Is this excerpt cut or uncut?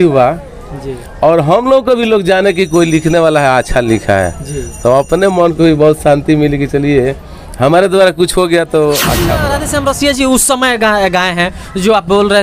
cut